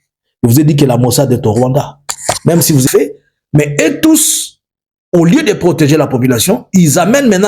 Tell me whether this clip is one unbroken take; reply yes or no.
no